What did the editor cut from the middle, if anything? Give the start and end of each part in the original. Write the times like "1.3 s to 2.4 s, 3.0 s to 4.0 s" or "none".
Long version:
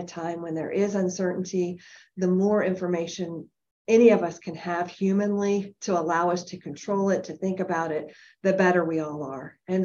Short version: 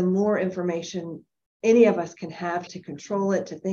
4.9 s to 6.5 s

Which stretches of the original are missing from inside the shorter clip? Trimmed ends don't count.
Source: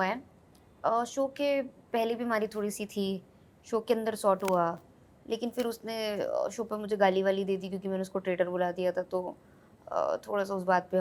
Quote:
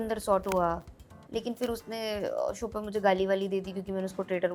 none

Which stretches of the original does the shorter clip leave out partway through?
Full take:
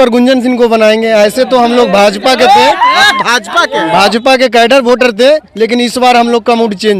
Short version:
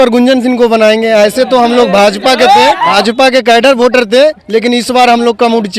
2.9 s to 3.9 s

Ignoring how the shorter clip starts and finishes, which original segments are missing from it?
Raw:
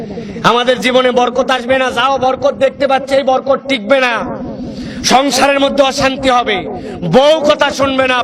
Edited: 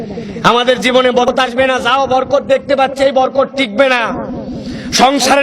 1.2 s to 1.4 s

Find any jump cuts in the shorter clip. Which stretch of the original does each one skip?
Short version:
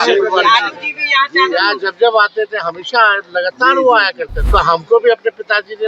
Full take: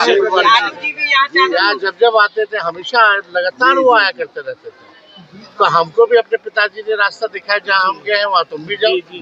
4.3 s to 5.4 s

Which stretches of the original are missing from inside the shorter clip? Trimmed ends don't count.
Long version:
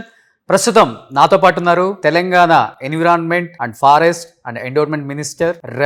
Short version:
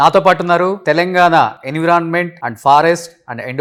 none

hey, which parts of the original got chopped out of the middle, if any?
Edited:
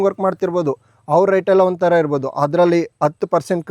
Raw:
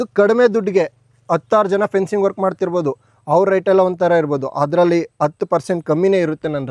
none

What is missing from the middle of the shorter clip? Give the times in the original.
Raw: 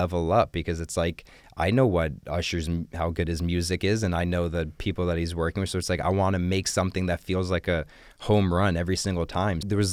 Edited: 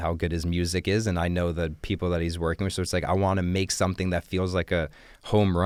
none

